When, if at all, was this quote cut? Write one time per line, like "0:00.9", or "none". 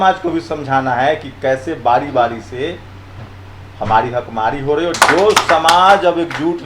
0:04.9

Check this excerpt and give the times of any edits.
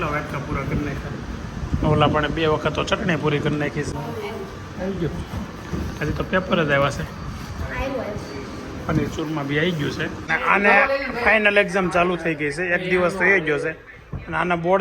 0:03.9
0:10.2

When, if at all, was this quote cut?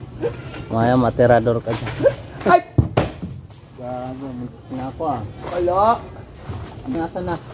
none

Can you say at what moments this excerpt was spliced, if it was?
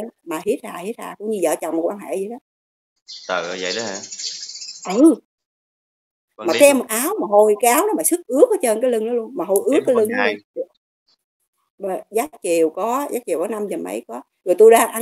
none

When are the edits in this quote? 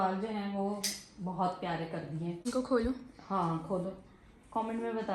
0:02.5

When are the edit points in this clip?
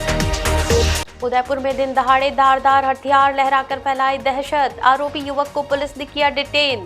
0:01.0

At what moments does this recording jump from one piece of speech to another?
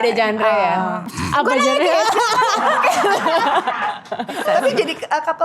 0:01.1
0:04.4

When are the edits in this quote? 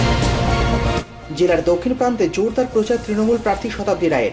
0:01.2

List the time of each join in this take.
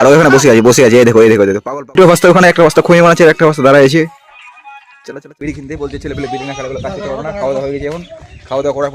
0:01.9
0:05.1

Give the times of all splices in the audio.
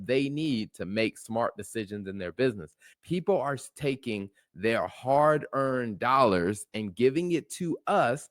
0:02.9

